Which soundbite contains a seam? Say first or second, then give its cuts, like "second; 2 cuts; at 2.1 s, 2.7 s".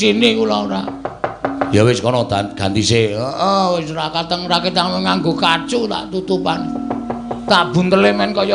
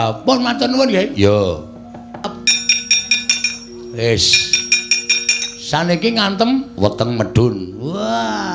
second; 1 cut; at 2.2 s